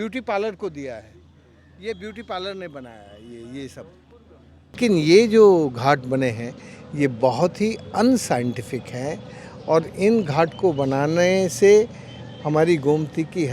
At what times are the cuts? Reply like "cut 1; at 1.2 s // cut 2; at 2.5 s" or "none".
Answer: cut 1; at 4.8 s